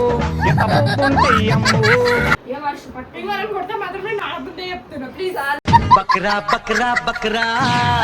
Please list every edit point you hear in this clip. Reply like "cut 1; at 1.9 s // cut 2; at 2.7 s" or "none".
cut 1; at 2.4 s